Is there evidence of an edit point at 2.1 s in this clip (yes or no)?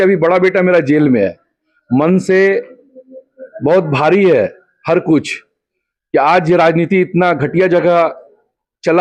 no